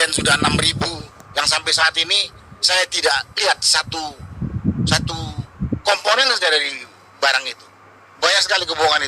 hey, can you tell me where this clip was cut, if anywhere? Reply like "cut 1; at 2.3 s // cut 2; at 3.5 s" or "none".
cut 1; at 8.2 s